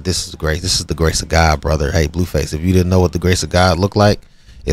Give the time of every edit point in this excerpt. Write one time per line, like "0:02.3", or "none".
none